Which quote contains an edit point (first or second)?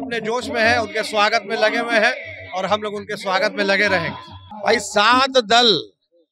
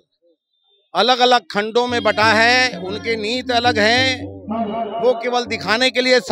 first